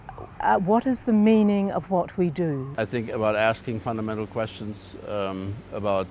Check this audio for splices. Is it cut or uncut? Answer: cut